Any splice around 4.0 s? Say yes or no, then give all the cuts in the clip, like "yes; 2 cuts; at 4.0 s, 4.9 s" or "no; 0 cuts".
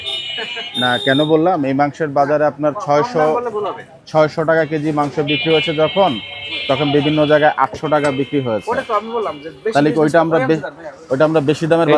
no; 0 cuts